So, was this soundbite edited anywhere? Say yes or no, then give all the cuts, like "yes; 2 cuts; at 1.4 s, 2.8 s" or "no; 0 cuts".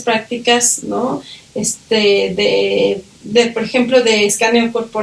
no; 0 cuts